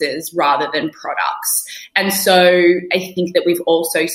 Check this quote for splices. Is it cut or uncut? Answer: cut